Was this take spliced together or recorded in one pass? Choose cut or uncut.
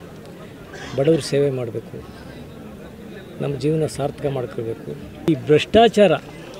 cut